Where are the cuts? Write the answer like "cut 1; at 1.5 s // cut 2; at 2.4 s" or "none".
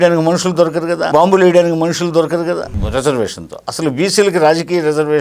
cut 1; at 1.0 s // cut 2; at 2.7 s